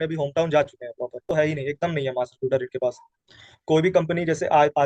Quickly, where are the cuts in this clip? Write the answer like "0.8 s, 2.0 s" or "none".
1.3 s